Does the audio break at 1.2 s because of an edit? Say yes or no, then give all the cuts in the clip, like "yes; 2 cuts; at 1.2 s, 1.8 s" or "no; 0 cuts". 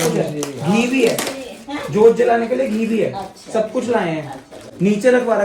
no; 0 cuts